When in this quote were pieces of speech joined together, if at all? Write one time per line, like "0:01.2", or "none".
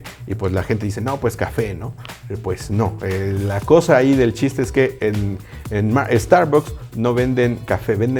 none